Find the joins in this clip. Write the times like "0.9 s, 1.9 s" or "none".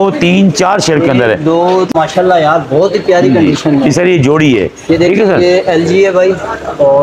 1.9 s